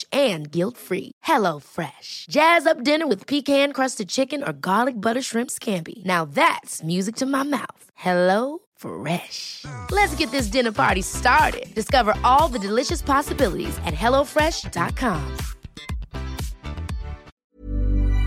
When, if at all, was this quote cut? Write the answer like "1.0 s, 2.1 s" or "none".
17.3 s